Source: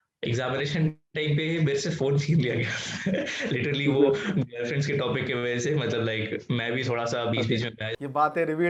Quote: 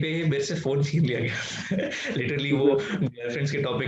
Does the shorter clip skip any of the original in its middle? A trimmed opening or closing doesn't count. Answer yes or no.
no